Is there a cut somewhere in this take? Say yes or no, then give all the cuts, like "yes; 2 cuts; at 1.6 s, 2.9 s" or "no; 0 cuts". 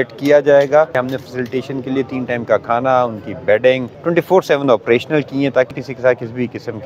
yes; 3 cuts; at 0.9 s, 3.9 s, 5.8 s